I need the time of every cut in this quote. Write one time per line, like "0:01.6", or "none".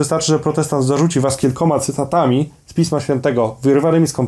none